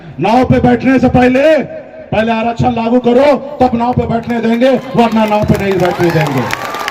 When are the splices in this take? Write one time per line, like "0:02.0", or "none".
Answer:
none